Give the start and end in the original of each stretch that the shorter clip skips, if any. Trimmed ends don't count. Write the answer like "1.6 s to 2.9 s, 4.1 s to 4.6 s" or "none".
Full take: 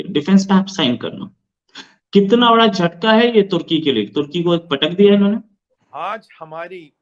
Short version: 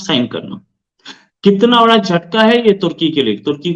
none